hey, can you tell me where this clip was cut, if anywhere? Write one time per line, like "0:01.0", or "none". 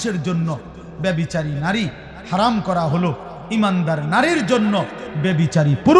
none